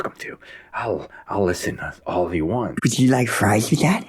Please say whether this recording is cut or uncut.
cut